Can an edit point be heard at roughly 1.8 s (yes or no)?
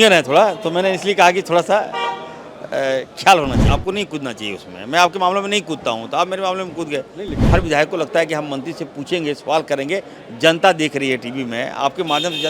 no